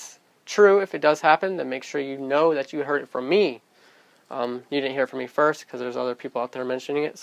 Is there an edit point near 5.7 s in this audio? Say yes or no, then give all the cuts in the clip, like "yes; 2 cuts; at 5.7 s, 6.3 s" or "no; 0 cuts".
yes; 1 cut; at 5.7 s